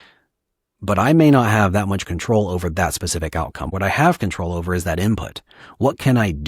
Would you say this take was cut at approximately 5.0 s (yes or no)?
no